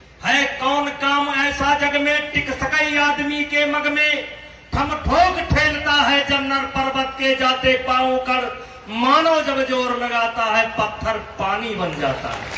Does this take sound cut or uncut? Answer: uncut